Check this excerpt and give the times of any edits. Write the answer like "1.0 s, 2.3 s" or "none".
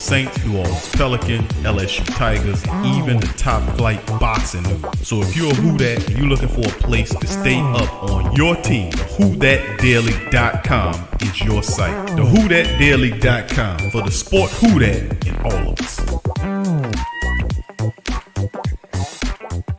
none